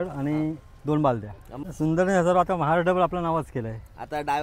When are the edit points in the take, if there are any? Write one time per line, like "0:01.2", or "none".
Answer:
0:01.6